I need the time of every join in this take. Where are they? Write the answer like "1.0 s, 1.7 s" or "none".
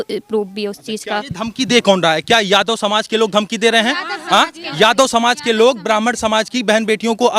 1.3 s